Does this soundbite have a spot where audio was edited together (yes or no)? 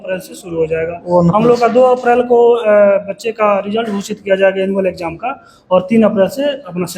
no